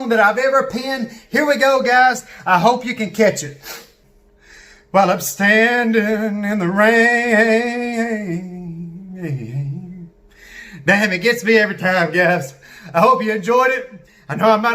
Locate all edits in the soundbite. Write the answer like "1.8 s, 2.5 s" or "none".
3.9 s